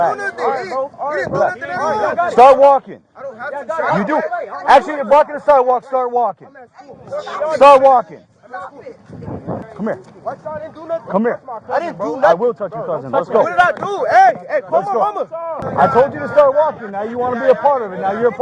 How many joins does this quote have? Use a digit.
2